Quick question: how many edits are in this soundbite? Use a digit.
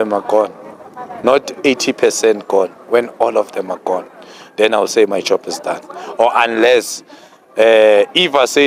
0